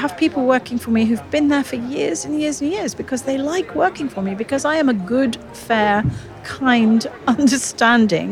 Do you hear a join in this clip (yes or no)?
no